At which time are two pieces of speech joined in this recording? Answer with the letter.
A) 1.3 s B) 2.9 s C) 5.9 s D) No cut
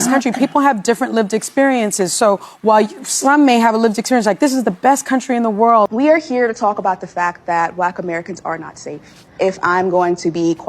C